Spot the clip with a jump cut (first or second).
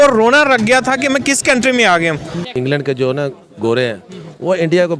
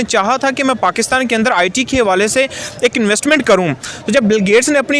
first